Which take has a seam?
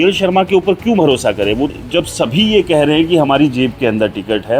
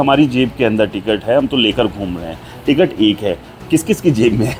first; 1 cut; at 1.7 s

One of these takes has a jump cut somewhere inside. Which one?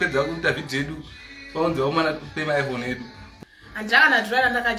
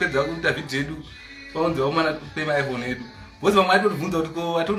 first; 1 cut; at 3.2 s

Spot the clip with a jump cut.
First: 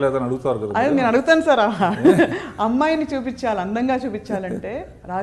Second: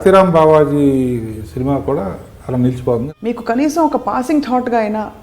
second; 1 cut; at 3.1 s

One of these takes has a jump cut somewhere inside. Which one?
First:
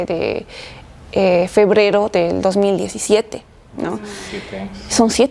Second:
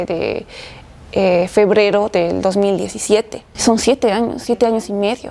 second; 1 cut; at 3.4 s

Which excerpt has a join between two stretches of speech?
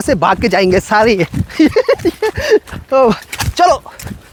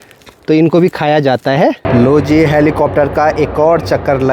second; 1 cut; at 1.8 s

